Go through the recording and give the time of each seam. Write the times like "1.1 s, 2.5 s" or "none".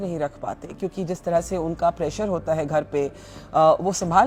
none